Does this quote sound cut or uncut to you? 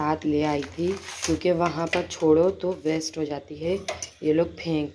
uncut